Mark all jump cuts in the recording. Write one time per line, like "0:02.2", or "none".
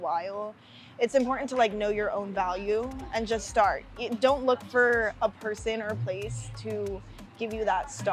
none